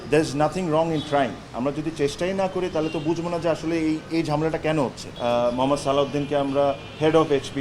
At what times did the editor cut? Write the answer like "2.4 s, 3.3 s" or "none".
5.0 s